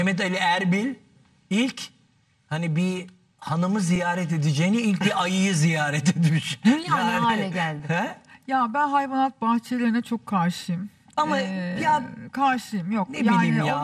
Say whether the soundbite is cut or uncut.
uncut